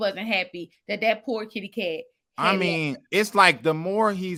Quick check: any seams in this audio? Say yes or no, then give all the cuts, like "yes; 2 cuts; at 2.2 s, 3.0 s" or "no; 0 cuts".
no; 0 cuts